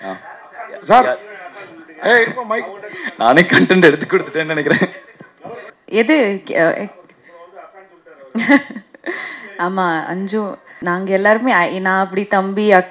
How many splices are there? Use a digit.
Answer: 2